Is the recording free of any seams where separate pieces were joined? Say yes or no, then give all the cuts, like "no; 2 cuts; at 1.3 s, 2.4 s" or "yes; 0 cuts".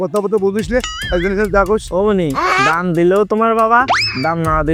yes; 0 cuts